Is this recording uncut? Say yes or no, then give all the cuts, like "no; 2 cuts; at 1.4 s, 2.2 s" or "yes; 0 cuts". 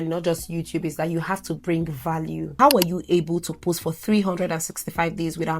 no; 1 cut; at 2.5 s